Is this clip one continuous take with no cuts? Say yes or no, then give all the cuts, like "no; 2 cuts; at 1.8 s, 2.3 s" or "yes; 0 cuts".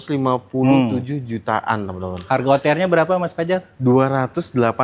yes; 0 cuts